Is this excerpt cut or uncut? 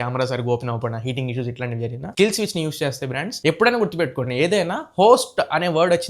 cut